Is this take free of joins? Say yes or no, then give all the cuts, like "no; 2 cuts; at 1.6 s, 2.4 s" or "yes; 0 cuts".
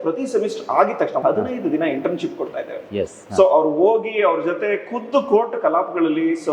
no; 1 cut; at 1.2 s